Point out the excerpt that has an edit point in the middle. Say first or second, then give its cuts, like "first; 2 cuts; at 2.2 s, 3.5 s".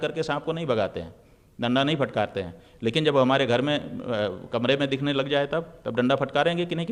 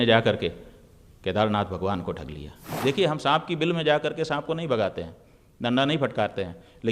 second; 1 cut; at 2.8 s